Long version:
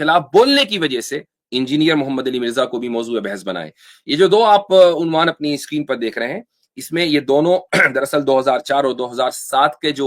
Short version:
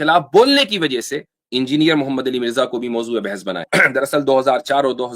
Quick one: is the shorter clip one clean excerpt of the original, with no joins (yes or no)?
no